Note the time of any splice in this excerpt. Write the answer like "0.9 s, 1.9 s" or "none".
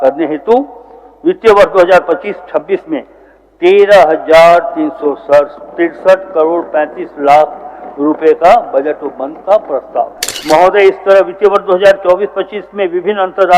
10.3 s